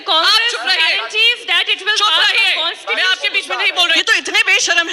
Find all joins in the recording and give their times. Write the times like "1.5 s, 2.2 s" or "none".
4.0 s